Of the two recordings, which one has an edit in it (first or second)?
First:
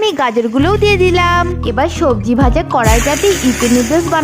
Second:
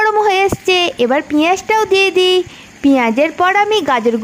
first